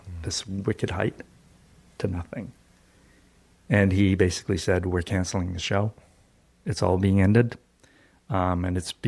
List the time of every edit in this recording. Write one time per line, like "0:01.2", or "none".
none